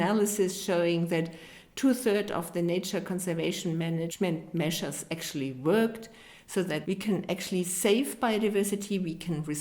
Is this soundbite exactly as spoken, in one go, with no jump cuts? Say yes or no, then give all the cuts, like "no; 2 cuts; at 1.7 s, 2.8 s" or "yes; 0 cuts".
no; 2 cuts; at 4.1 s, 6.4 s